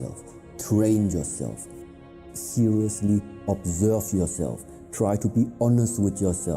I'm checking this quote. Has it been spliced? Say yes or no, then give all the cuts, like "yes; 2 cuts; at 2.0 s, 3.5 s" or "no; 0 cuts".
no; 0 cuts